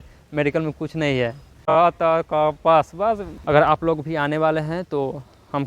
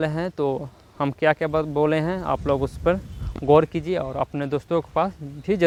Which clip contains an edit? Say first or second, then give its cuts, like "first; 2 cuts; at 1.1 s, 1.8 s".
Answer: first; 2 cuts; at 1.8 s, 3.3 s